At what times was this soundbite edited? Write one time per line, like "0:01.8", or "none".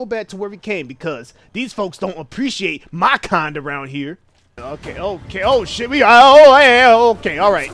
0:04.6